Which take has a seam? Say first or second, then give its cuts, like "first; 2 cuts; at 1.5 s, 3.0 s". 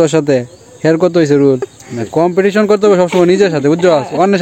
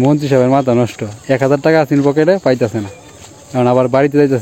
first; 1 cut; at 1.7 s